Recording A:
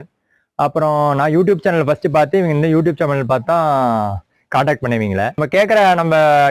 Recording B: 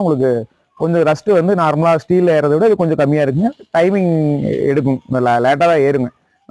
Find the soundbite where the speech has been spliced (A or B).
A